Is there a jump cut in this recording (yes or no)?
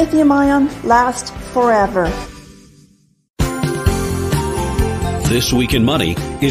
no